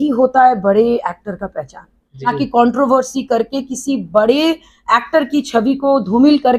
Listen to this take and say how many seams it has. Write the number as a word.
one